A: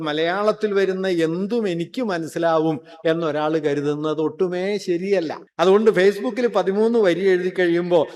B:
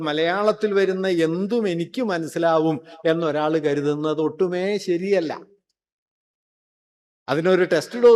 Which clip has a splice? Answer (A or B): A